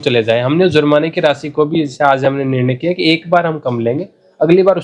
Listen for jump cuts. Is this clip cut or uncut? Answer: uncut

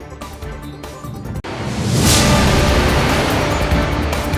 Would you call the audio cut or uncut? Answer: cut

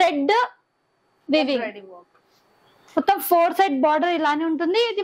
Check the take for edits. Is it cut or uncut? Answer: uncut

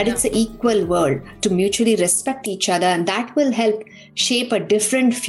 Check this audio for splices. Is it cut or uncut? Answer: uncut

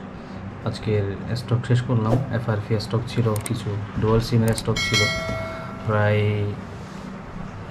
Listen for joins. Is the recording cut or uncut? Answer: uncut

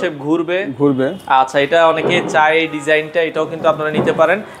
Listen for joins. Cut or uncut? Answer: uncut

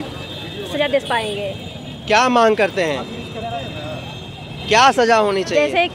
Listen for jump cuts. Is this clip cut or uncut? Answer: uncut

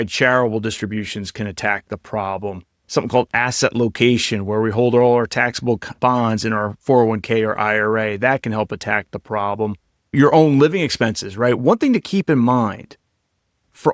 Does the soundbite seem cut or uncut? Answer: uncut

